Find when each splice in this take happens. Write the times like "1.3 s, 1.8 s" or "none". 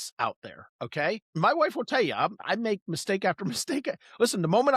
1.3 s, 2.4 s